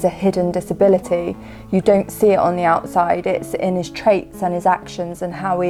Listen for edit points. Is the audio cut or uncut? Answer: uncut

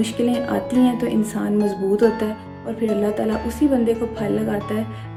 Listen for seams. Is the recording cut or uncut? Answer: uncut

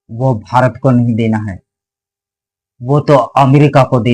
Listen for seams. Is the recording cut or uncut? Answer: uncut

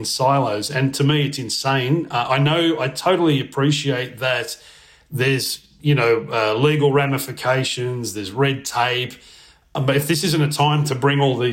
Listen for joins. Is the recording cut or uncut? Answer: uncut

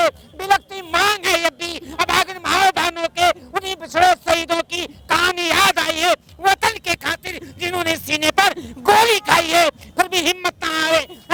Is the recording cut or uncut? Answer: uncut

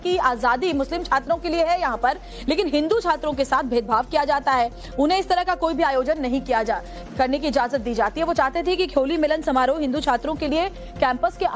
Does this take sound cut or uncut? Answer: cut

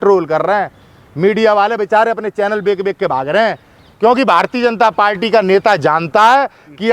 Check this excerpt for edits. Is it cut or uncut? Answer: cut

